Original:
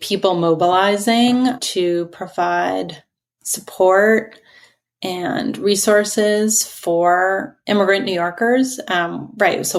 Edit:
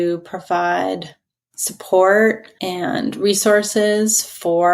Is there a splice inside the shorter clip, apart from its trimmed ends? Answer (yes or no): yes